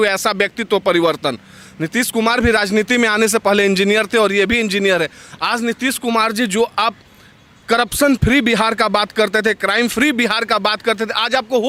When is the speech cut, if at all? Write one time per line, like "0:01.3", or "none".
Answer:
none